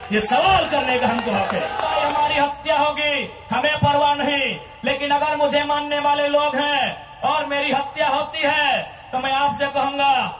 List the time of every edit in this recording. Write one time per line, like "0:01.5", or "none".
0:01.9